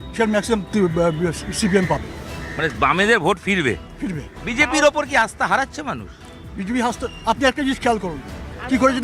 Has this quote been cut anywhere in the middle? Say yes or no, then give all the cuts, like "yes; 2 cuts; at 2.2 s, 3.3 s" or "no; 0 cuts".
no; 0 cuts